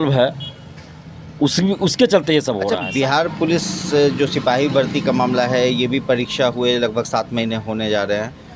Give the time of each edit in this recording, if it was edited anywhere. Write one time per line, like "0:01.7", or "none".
0:02.7